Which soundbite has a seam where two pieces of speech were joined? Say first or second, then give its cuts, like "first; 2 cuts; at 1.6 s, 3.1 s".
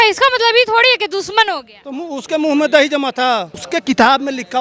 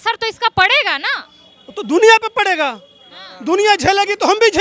first; 1 cut; at 3.5 s